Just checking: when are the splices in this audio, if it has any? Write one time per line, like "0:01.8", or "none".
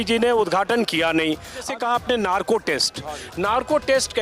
0:01.7